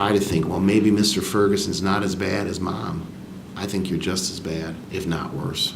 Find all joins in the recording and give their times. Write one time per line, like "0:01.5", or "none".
0:04.8